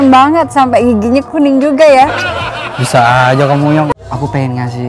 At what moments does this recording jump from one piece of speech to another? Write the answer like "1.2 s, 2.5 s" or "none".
3.9 s